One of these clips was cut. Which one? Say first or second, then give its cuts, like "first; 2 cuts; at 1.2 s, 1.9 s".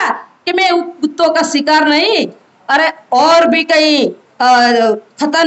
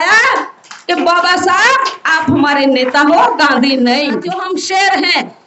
second; 1 cut; at 4.4 s